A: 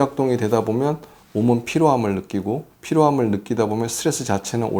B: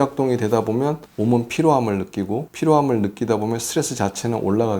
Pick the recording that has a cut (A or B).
B